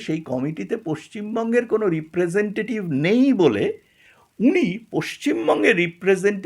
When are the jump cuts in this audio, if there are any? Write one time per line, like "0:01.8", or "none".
none